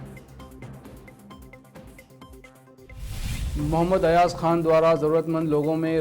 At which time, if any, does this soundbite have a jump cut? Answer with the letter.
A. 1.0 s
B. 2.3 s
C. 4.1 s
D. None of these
B